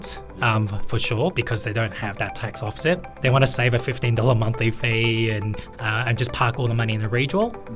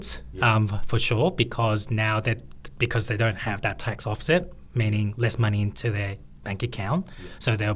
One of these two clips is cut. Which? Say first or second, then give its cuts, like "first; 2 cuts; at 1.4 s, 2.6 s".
first; 3 cuts; at 1.3 s, 3.1 s, 5.6 s